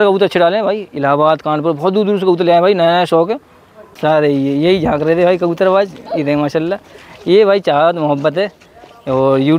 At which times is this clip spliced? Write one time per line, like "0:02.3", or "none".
0:03.9